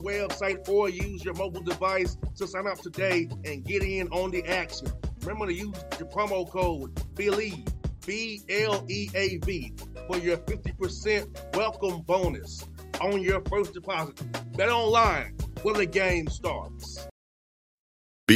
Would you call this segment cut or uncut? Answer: cut